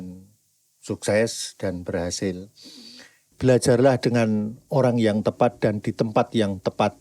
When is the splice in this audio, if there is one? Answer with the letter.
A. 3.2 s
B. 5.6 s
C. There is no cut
A